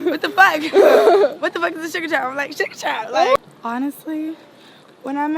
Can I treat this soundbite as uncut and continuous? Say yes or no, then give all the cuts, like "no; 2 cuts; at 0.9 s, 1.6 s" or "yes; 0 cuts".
no; 1 cut; at 3.4 s